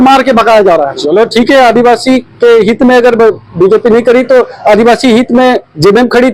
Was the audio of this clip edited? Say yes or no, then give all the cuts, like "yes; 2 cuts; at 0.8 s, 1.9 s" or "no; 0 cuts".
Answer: yes; 1 cut; at 1.0 s